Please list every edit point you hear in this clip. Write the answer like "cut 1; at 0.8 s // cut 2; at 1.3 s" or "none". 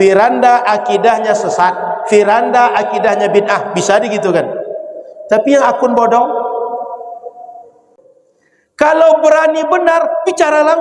cut 1; at 7.9 s